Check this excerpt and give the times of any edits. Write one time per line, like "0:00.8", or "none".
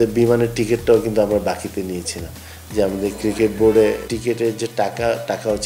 0:04.1

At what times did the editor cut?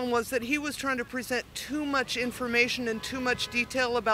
none

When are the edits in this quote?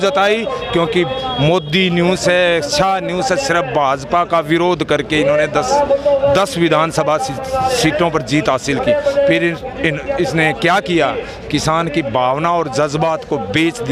none

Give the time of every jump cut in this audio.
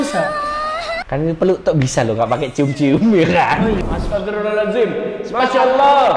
0:03.8

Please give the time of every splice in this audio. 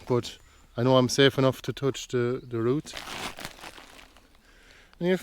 0:03.0

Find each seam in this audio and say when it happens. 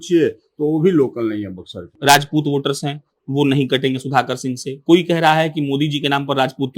0:01.9

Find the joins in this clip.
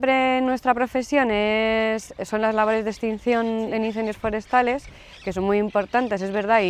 none

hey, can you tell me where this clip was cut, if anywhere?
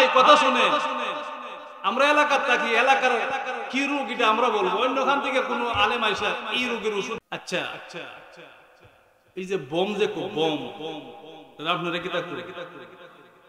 0:07.2

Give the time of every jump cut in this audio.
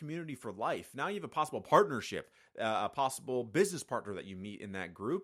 none

